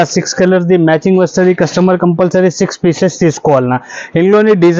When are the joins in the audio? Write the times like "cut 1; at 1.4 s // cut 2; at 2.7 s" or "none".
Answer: none

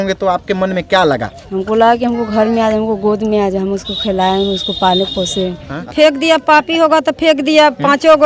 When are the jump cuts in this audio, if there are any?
cut 1; at 5.9 s

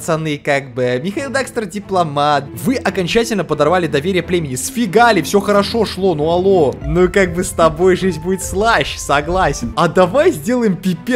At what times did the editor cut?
cut 1; at 2.5 s // cut 2; at 6.8 s // cut 3; at 9.7 s

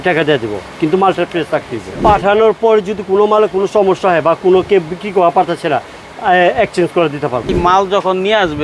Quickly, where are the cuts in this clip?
cut 1; at 2.0 s // cut 2; at 7.6 s

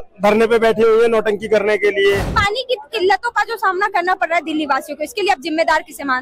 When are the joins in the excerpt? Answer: cut 1; at 2.4 s

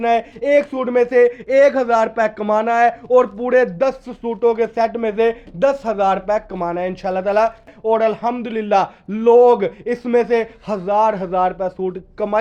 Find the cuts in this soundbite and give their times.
cut 1; at 7.7 s

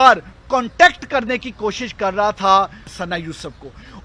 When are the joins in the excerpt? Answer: cut 1; at 2.9 s

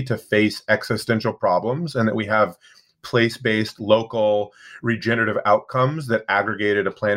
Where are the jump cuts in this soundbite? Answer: none

